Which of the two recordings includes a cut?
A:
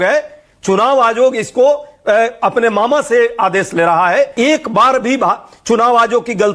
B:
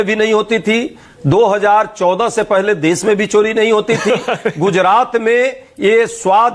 A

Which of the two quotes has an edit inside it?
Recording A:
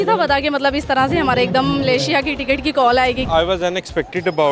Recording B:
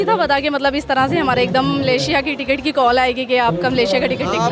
A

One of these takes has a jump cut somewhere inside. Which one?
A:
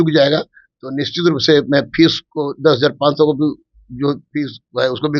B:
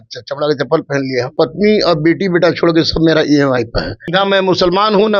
B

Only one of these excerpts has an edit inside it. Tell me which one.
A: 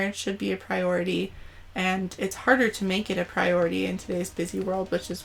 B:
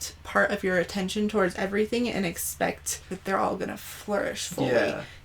B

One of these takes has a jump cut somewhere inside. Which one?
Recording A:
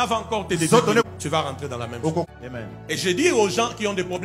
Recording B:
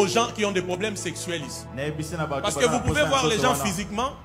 A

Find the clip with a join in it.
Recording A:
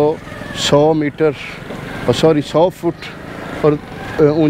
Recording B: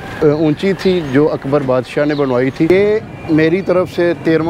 B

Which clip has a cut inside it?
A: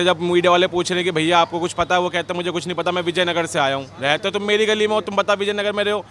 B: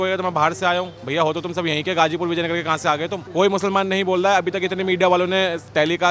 B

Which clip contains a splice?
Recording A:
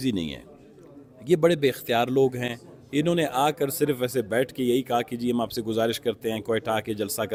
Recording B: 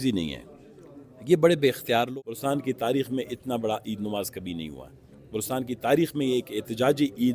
B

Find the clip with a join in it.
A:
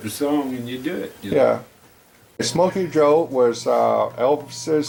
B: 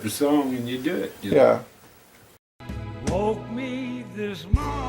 B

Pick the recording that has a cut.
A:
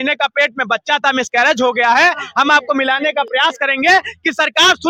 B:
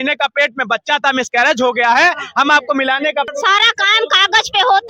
B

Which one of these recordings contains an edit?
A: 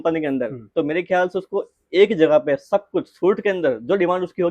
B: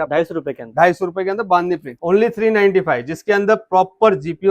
B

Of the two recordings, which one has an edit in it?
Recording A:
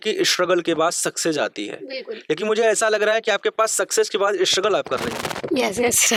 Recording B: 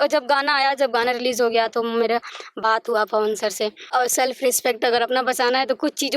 B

